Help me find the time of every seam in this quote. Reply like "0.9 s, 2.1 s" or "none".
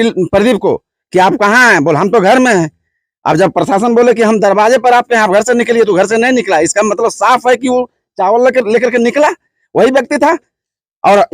none

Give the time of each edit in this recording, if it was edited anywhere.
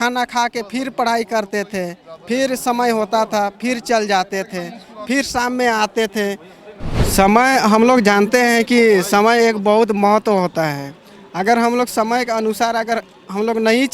7.0 s

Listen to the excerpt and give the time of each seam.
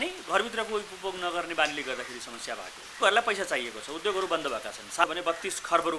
3.0 s, 5.0 s

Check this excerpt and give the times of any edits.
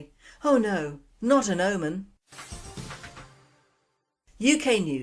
3.0 s

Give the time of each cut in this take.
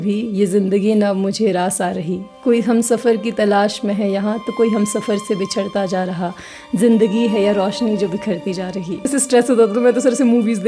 9.1 s

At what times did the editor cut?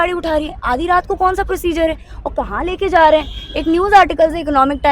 none

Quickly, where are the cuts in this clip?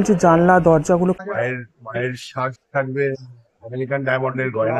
1.2 s

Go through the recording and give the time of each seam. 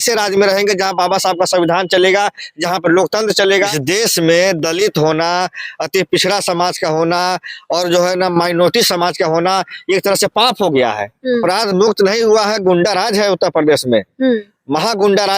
3.7 s, 11.4 s

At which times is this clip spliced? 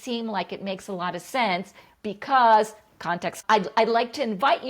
3.3 s

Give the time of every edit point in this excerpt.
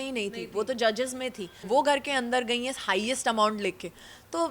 1.5 s

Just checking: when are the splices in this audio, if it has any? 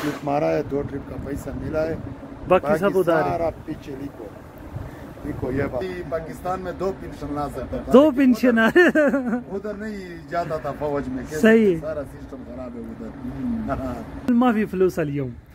5.8 s, 14.3 s

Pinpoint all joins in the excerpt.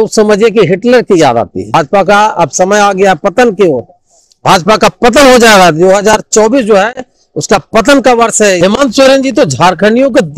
1.7 s, 8.6 s

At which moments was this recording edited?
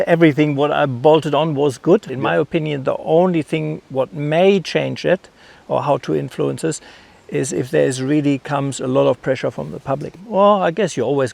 2.1 s, 10.1 s

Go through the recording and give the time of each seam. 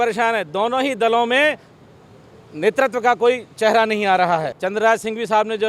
4.6 s

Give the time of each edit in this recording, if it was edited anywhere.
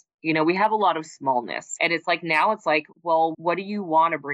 1.7 s

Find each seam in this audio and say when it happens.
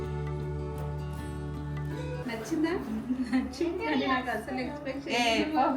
2.2 s

